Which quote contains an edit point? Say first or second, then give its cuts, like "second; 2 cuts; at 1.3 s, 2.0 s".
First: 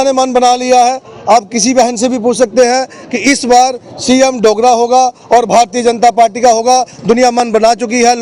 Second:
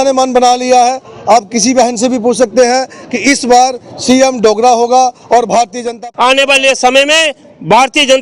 second; 1 cut; at 5.9 s